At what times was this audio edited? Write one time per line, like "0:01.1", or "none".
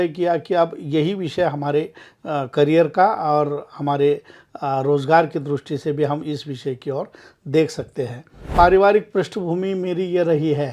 0:08.5